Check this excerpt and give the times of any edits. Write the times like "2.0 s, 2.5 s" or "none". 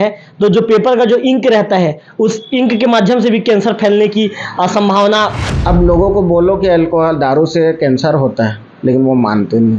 5.4 s